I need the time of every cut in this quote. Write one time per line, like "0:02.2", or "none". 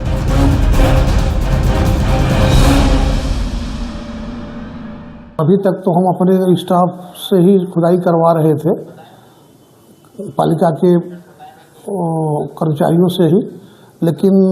0:05.2